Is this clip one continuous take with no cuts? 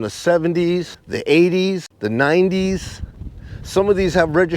no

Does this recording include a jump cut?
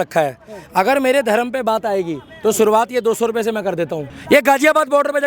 yes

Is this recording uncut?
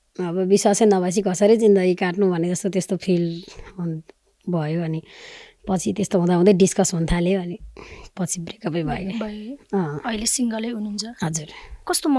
yes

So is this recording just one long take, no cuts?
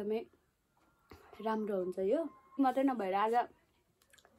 no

